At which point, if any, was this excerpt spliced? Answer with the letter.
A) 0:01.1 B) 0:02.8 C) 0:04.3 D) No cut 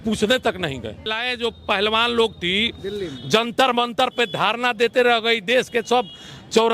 A